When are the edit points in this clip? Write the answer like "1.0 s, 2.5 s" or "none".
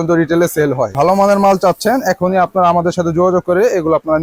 none